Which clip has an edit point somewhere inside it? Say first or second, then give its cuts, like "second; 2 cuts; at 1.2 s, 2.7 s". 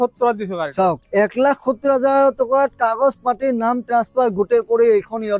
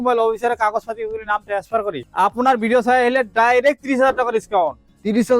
second; 1 cut; at 2.0 s